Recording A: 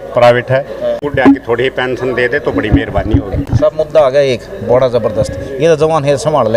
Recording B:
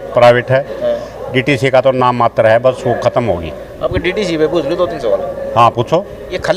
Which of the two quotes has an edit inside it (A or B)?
A